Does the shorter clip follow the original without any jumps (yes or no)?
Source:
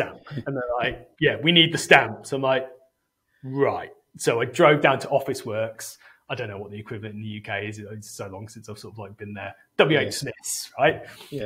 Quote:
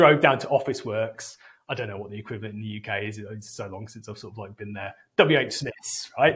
yes